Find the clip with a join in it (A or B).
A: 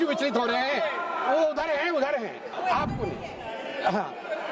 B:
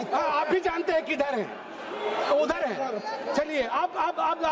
A